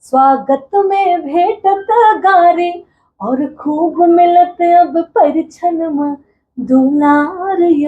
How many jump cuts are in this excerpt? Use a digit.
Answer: 0